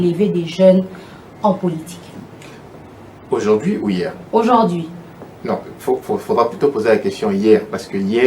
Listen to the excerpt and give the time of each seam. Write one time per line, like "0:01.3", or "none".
none